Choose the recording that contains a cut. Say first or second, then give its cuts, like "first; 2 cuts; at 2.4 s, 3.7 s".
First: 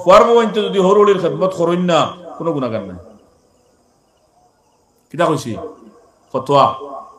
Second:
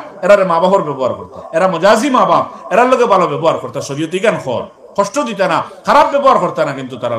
second; 1 cut; at 1.4 s